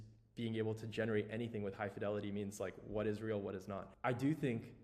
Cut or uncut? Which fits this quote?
cut